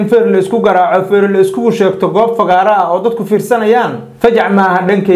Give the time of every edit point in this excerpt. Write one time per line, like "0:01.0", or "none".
0:04.0